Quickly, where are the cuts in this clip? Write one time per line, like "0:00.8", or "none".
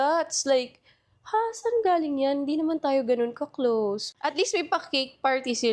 0:04.0